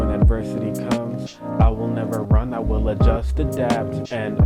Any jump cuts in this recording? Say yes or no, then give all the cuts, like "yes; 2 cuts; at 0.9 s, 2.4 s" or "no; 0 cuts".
no; 0 cuts